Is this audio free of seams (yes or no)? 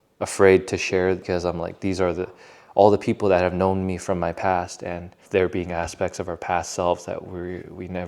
no